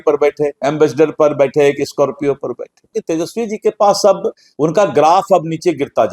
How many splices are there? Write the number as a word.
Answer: one